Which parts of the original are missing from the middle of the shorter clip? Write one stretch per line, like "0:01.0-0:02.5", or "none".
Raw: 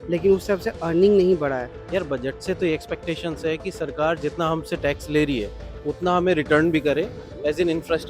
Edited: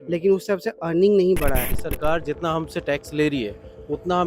0:01.8-0:03.7